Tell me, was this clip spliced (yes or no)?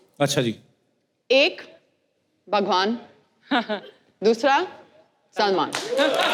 no